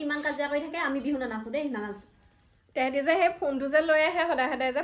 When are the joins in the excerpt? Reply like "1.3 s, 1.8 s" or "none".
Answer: none